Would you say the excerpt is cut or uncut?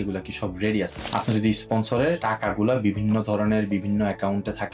cut